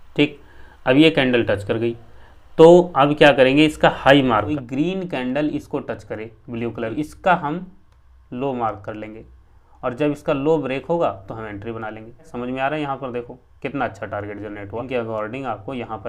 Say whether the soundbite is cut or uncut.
cut